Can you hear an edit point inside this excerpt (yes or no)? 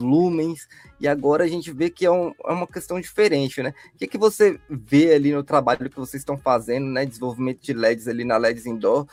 no